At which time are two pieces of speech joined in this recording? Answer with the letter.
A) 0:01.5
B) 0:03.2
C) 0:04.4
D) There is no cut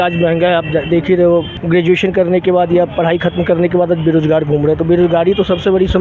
A